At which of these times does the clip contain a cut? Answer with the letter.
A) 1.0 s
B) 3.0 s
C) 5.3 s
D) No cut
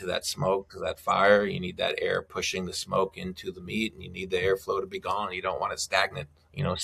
D